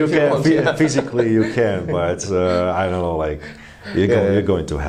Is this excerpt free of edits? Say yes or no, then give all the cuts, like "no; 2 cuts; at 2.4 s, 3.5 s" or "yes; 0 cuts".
yes; 0 cuts